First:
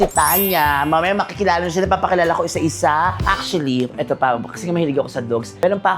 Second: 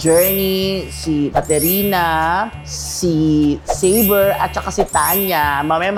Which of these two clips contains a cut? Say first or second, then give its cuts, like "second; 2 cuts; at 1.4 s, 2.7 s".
first; 1 cut; at 3.2 s